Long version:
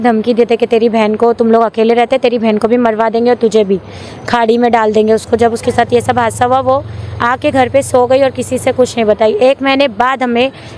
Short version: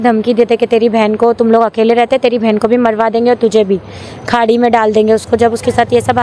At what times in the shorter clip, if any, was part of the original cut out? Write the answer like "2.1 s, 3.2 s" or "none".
none